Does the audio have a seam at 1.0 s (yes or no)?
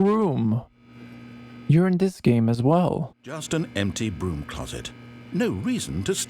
no